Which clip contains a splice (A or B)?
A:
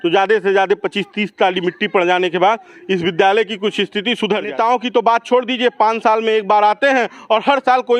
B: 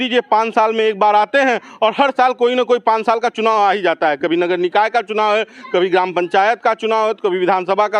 A